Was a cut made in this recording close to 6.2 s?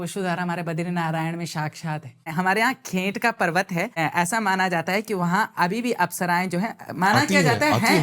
no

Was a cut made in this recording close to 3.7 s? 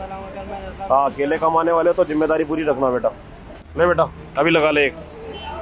no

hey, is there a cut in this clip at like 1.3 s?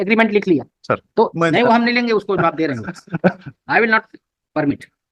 yes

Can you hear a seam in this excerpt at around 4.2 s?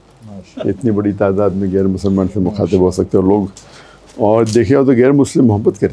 no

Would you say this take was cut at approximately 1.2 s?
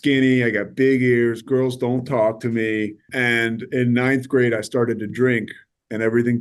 no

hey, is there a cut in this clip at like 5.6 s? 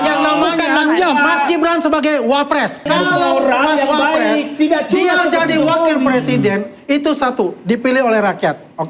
no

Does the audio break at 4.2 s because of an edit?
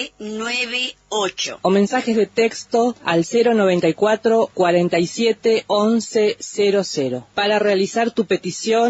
no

